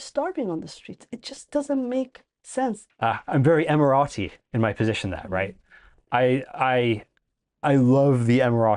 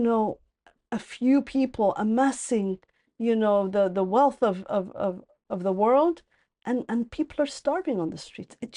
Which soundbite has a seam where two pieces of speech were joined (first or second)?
first